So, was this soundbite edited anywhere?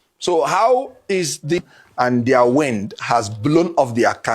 yes; 1 cut; at 1.5 s

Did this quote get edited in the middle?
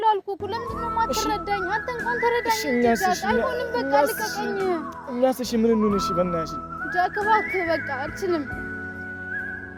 no; 0 cuts

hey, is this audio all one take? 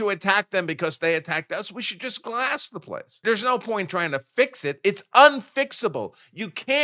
no; 1 cut; at 3.2 s

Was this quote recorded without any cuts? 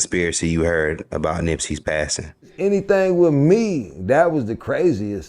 no; 1 cut; at 2.5 s

